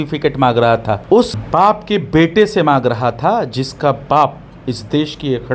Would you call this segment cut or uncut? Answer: cut